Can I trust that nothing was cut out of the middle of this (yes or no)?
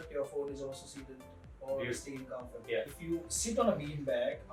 no